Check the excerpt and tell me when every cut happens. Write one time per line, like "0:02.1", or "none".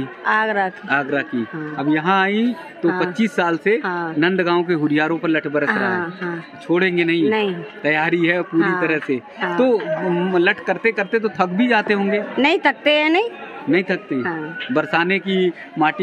none